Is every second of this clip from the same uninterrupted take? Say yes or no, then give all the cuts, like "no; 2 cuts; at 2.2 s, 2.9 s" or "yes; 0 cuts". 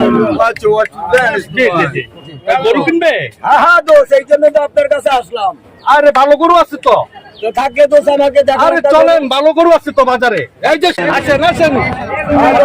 no; 1 cut; at 11.0 s